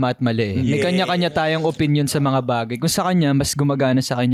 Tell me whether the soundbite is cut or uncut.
uncut